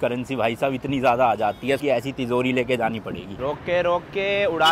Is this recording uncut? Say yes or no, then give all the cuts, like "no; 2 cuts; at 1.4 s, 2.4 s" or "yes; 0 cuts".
no; 2 cuts; at 1.8 s, 3.4 s